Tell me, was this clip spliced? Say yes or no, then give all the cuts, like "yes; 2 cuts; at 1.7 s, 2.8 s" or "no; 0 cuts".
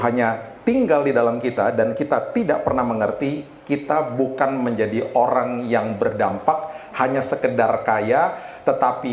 no; 0 cuts